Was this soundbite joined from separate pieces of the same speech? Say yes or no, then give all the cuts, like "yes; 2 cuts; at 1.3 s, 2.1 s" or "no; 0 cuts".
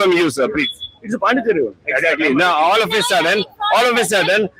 no; 0 cuts